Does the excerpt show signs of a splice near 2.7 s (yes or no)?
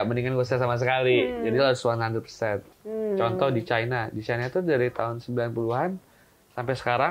yes